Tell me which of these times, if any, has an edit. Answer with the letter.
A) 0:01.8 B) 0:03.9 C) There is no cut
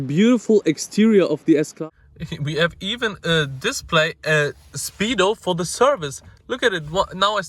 A